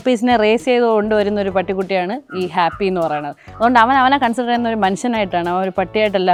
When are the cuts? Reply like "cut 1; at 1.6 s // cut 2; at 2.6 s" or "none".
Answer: none